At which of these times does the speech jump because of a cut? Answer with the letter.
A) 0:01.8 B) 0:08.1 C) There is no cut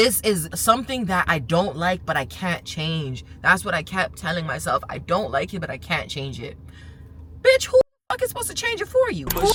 C